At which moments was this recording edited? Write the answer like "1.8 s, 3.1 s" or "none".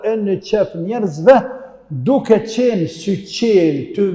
none